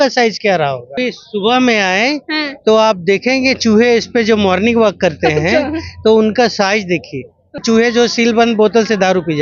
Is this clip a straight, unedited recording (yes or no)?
no